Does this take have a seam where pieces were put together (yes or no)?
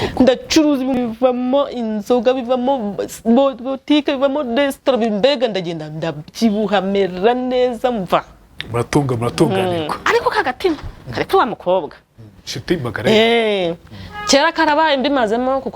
yes